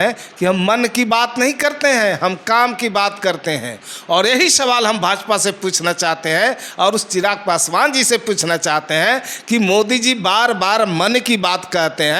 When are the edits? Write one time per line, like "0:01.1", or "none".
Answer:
none